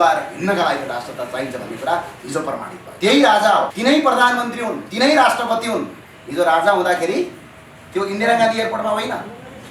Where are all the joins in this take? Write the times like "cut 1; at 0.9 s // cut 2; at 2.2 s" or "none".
cut 1; at 2.8 s // cut 2; at 3.7 s